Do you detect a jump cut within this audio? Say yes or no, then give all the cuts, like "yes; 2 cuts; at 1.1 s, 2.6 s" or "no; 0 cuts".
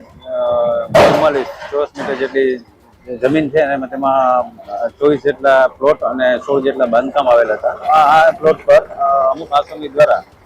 yes; 1 cut; at 7.8 s